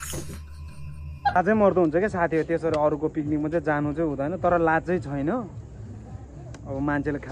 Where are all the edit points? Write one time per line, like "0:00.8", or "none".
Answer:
0:01.3